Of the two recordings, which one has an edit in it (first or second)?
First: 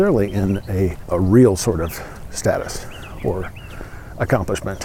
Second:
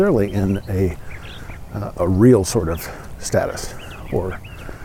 first